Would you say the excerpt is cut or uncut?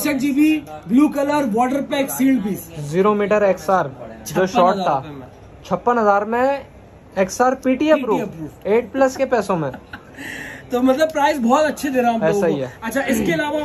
uncut